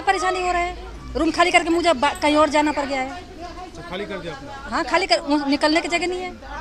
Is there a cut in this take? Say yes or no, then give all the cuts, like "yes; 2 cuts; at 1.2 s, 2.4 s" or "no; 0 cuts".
no; 0 cuts